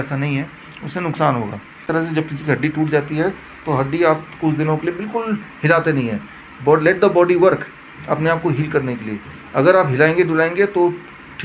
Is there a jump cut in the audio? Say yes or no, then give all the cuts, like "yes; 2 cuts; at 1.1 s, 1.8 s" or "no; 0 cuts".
yes; 1 cut; at 1.8 s